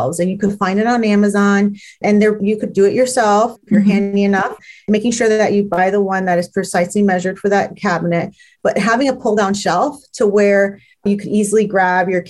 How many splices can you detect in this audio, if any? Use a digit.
1